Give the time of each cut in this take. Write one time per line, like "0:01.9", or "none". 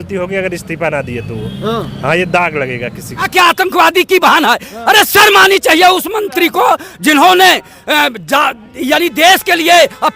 0:03.3